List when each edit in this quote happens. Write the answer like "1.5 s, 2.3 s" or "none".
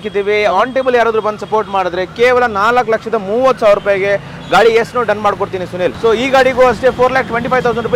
5.9 s

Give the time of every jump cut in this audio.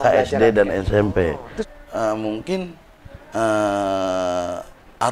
1.5 s

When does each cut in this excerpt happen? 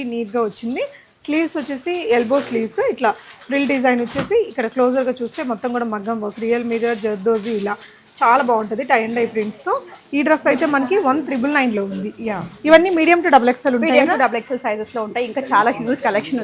none

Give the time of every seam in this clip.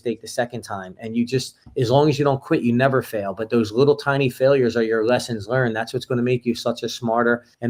none

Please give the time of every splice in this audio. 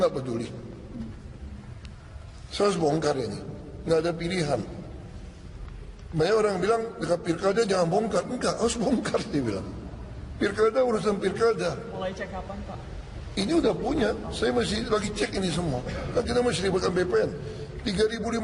15.1 s

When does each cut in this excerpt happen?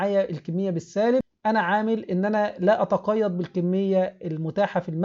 1.3 s

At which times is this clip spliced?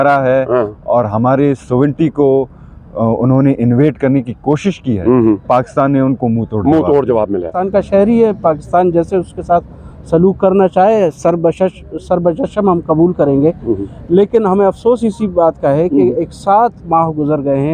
7.5 s

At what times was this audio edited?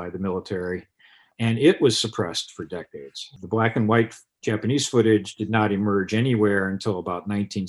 3.3 s

